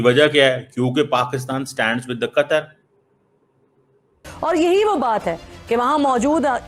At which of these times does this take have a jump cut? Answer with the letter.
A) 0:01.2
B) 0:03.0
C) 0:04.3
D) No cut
C